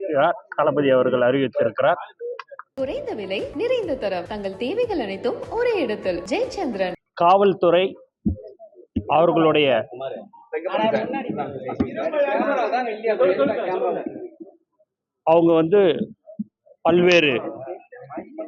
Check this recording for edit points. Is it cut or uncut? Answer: cut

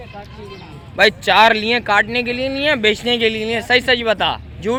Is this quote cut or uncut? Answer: uncut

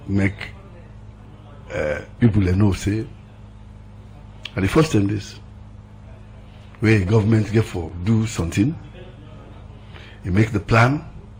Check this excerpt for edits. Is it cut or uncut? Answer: uncut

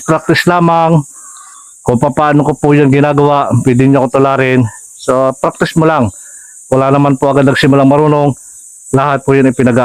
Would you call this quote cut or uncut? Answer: uncut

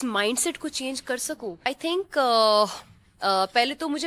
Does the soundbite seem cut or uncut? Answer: cut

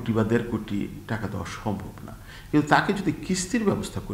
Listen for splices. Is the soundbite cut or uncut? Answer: uncut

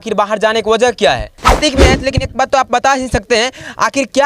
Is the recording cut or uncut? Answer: cut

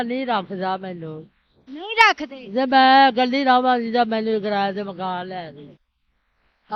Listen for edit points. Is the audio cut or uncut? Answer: uncut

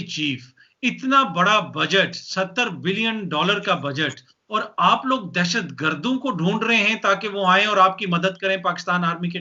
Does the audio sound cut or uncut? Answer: uncut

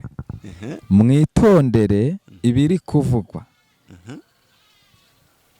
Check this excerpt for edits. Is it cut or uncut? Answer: uncut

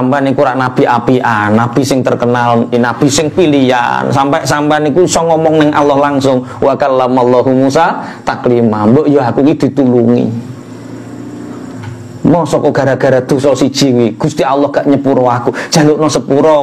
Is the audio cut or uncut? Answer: cut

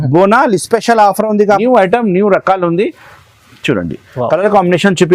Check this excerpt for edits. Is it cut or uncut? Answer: cut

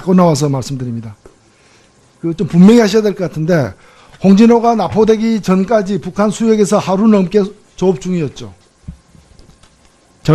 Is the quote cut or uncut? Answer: cut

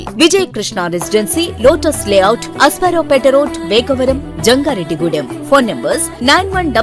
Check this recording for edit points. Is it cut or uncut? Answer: uncut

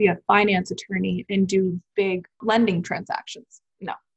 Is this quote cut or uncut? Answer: cut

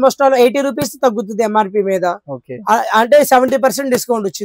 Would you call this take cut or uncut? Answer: uncut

